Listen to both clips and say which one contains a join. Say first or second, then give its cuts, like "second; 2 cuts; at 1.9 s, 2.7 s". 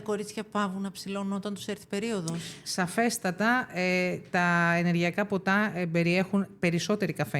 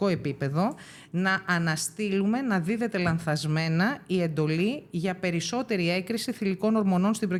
first; 1 cut; at 2.5 s